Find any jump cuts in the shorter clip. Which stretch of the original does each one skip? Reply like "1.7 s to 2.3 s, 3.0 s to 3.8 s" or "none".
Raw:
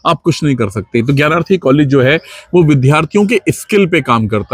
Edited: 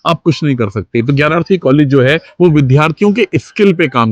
2.3 s to 2.4 s